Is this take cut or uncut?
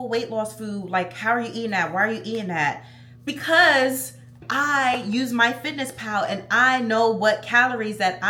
uncut